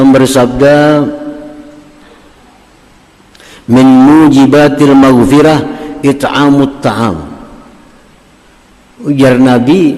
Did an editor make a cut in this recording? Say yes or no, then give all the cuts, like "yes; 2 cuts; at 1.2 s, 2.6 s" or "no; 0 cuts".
no; 0 cuts